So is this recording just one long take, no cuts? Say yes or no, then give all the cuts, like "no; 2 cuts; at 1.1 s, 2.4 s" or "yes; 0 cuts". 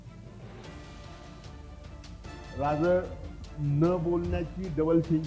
no; 1 cut; at 2.0 s